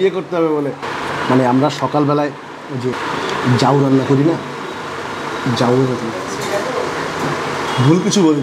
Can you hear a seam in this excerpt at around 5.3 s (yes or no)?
no